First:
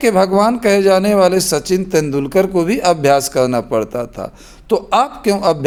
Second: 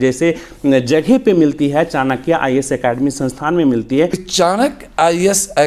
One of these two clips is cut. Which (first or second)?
second